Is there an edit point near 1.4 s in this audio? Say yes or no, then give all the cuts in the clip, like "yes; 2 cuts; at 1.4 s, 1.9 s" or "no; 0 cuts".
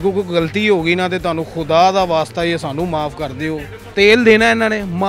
no; 1 cut; at 3.8 s